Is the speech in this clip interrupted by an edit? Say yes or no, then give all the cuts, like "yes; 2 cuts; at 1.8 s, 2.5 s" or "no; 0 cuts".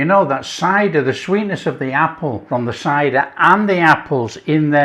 yes; 1 cut; at 2.4 s